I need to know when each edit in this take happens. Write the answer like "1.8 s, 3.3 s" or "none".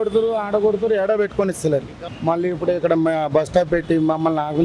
2.0 s